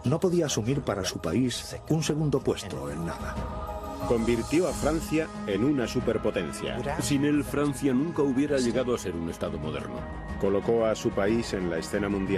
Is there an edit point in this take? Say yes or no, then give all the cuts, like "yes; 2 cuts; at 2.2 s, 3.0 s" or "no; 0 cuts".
yes; 1 cut; at 9.2 s